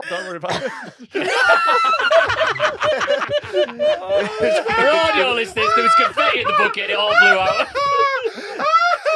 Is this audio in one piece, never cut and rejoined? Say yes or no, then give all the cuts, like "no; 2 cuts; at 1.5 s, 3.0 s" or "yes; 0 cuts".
no; 1 cut; at 0.9 s